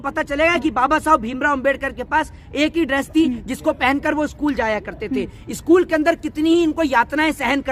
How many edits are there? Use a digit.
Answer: 0